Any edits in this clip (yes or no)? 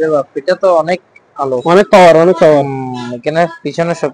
no